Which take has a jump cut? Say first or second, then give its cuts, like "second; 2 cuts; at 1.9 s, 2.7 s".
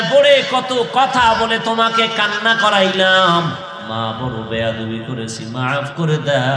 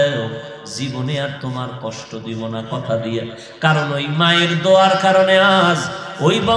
first; 1 cut; at 3.7 s